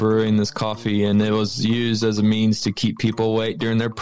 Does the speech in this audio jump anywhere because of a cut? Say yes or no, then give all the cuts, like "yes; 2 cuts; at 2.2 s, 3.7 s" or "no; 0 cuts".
no; 0 cuts